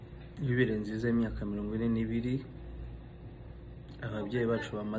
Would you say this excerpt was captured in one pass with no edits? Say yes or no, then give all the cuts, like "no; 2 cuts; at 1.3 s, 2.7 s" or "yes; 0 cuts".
yes; 0 cuts